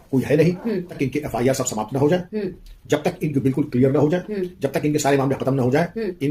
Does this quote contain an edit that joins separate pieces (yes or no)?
yes